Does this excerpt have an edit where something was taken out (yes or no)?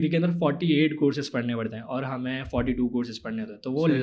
no